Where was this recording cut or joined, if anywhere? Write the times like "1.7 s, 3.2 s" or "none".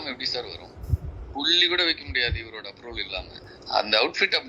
3.4 s